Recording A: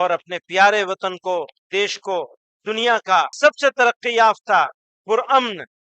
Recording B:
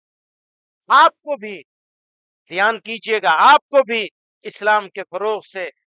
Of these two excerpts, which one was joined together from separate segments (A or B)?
A